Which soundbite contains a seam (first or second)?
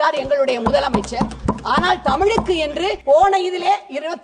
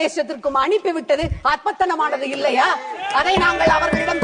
first